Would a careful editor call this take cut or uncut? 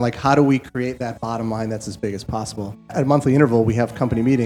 cut